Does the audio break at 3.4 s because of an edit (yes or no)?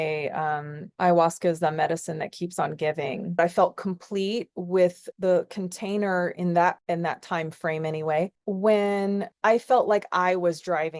yes